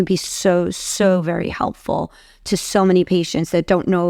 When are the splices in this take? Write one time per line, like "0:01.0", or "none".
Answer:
none